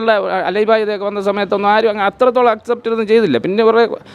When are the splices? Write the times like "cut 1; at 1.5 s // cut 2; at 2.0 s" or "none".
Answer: none